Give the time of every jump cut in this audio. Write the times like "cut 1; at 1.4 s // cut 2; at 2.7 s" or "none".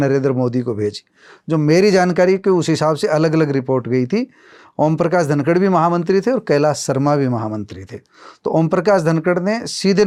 none